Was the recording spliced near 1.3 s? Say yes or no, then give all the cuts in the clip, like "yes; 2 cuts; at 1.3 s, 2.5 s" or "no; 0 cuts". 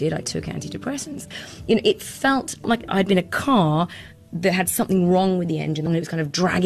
yes; 2 cuts; at 1.3 s, 5.9 s